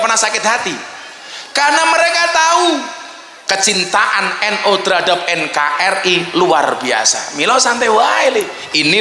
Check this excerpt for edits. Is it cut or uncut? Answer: uncut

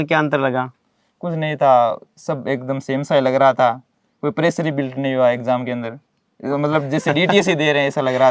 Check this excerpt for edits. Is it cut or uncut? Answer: uncut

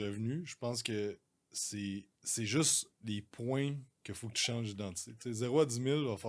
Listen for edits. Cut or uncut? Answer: cut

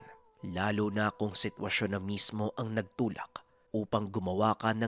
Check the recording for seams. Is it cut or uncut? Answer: uncut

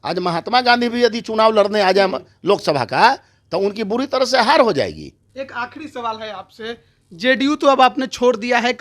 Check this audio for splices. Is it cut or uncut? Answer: uncut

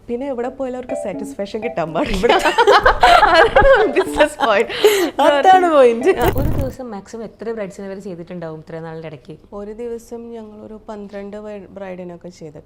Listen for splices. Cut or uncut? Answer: cut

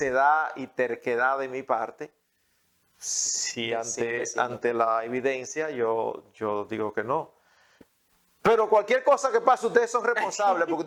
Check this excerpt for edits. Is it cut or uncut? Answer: uncut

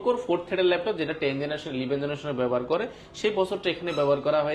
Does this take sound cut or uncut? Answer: uncut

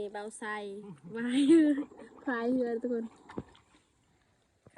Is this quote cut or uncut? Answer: uncut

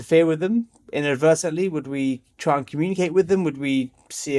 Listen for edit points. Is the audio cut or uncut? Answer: uncut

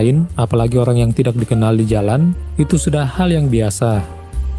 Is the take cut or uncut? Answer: uncut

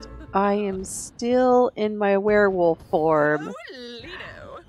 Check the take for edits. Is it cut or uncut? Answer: uncut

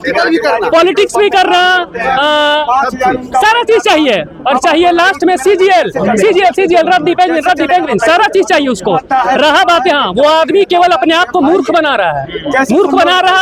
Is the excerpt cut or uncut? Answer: uncut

